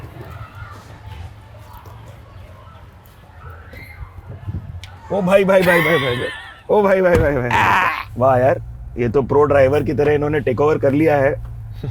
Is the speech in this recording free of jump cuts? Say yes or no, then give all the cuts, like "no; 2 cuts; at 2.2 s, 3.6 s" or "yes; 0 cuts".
no; 1 cut; at 8.0 s